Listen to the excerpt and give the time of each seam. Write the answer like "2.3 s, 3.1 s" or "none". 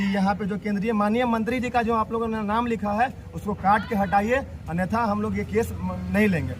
none